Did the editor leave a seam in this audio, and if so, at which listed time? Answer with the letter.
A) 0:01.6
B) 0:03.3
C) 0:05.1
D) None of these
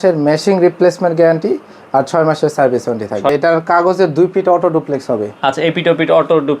B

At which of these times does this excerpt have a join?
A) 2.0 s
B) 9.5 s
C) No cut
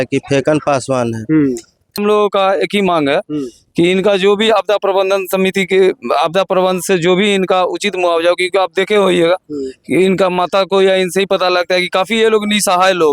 A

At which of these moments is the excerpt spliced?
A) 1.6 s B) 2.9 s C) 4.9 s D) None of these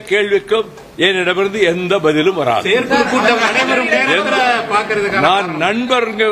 D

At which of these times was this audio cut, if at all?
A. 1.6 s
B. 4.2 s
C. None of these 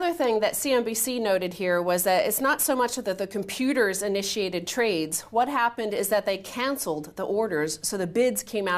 A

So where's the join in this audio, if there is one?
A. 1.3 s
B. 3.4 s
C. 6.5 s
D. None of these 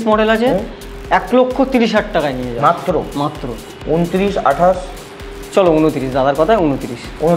D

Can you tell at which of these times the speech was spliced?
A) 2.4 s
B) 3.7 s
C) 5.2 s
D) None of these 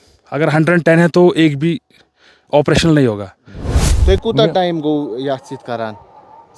B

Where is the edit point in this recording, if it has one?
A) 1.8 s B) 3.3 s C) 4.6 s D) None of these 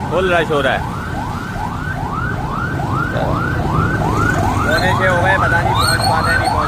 D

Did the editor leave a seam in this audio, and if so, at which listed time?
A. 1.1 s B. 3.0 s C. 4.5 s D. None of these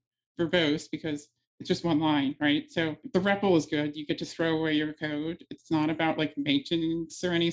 B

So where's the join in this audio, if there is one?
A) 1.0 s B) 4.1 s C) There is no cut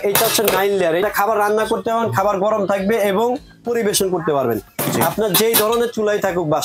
A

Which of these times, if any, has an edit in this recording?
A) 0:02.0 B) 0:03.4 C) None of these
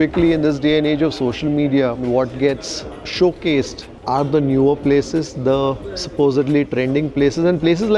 A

